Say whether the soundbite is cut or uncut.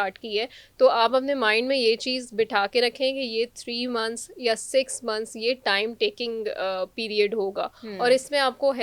uncut